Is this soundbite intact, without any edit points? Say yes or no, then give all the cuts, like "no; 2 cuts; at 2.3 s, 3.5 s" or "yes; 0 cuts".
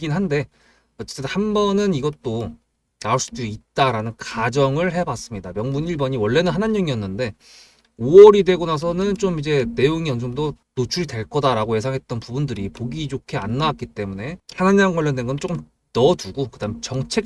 no; 2 cuts; at 10.6 s, 14.4 s